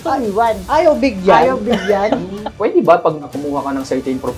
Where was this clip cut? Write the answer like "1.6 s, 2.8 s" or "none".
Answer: 2.4 s, 3.3 s